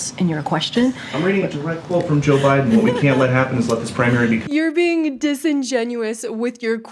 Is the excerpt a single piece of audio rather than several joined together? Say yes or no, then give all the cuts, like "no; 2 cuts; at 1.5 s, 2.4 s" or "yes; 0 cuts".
yes; 0 cuts